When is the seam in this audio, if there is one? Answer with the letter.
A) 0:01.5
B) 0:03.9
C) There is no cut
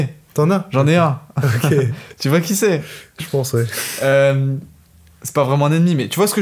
C